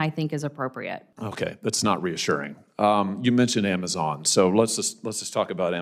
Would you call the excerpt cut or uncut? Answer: cut